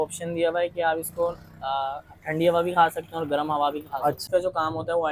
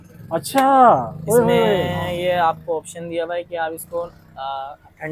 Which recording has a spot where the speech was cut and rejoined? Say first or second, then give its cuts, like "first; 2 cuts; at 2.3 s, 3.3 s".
first; 1 cut; at 4.2 s